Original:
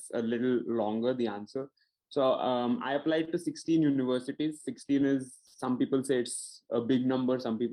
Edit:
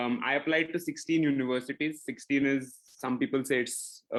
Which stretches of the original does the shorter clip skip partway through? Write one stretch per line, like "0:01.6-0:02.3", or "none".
none